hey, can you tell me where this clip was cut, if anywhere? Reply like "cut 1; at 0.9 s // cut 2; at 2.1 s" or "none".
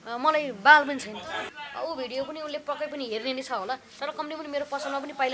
cut 1; at 1.5 s